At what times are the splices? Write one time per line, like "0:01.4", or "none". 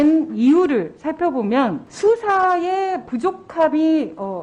0:01.9